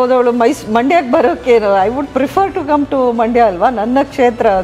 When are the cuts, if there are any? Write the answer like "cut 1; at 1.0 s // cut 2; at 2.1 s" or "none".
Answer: none

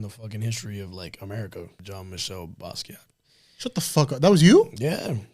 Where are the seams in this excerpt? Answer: cut 1; at 1.8 s

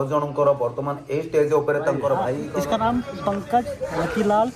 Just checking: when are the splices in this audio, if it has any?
cut 1; at 2.4 s

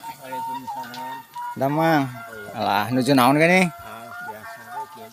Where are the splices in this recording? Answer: none

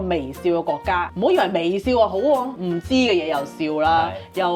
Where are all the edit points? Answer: cut 1; at 1.1 s // cut 2; at 2.5 s

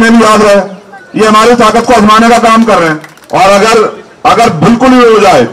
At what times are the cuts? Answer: cut 1; at 3.1 s

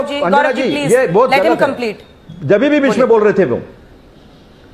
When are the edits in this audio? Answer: none

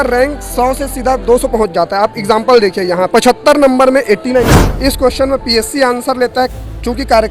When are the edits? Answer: cut 1; at 3.1 s // cut 2; at 4.6 s

